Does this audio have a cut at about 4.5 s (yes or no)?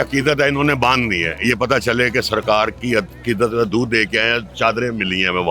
yes